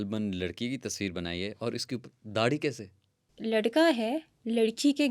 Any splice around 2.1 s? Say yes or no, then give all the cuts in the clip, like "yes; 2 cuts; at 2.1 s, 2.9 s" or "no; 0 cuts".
no; 1 cut; at 3.3 s